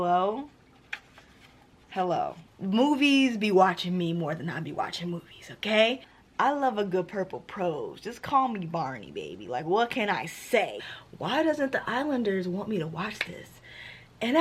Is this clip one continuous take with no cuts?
no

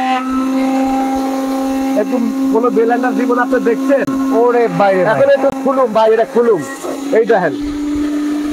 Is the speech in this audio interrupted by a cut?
no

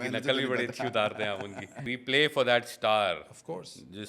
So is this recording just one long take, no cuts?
no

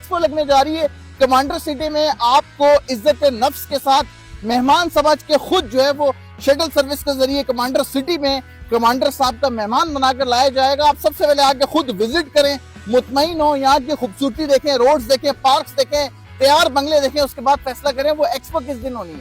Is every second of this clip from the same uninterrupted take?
yes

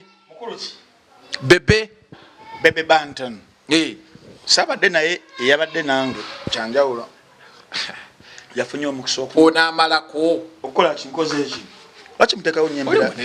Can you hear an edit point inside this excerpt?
no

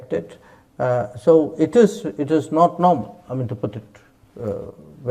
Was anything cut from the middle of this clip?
no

